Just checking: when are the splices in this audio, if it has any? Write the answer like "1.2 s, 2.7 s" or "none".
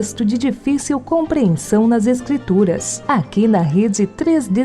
none